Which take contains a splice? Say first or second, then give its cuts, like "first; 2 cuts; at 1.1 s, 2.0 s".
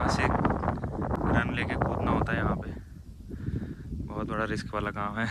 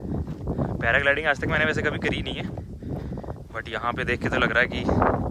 first; 1 cut; at 1.1 s